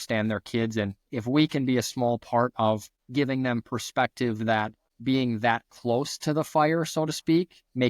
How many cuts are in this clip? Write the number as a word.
two